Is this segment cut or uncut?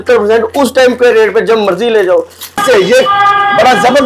cut